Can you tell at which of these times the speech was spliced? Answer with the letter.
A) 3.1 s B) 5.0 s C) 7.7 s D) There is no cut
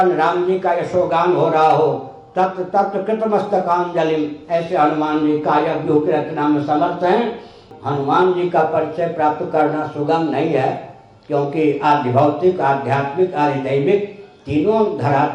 C